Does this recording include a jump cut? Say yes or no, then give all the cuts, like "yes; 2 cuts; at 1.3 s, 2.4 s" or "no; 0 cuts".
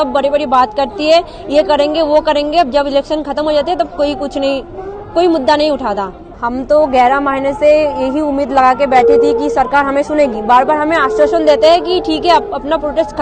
no; 0 cuts